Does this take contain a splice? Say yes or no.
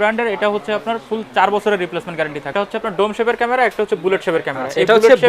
yes